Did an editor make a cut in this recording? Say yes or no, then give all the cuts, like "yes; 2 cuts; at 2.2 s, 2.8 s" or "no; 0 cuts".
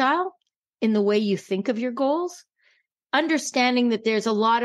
yes; 1 cut; at 2.6 s